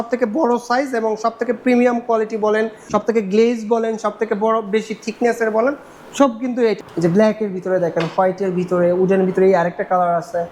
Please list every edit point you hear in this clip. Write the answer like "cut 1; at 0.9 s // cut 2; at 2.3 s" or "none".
cut 1; at 2.9 s // cut 2; at 6.8 s